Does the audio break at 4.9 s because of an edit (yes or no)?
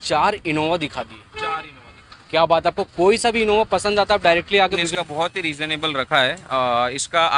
yes